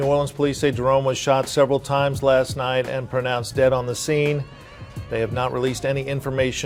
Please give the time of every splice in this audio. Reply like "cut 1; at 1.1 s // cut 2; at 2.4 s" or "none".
none

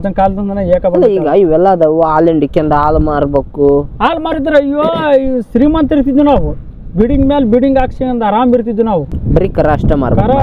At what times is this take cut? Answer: cut 1; at 9.1 s

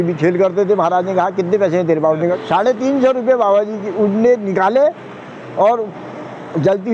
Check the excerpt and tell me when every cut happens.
cut 1; at 2.4 s

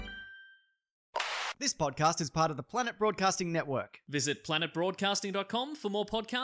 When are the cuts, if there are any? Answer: cut 1; at 1.2 s

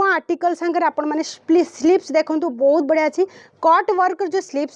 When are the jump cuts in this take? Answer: none

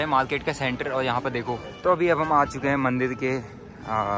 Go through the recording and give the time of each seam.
cut 1; at 1.7 s

